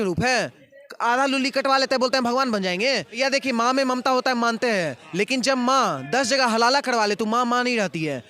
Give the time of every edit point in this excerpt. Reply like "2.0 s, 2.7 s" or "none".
3.1 s

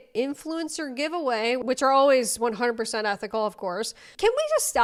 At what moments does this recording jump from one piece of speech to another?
none

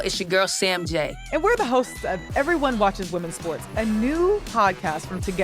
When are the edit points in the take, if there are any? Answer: 1.1 s

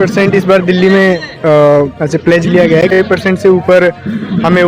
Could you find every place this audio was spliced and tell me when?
2.9 s

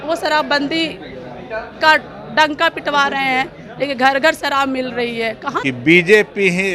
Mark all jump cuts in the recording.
5.6 s

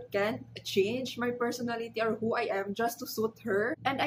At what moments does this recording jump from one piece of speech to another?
none

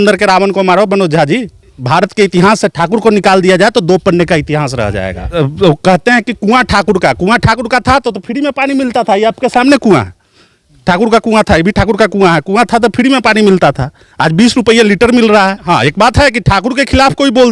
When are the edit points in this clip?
1.8 s, 5.2 s, 15.6 s

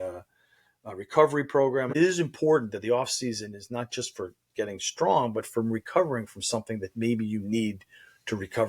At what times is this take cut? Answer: 2.0 s

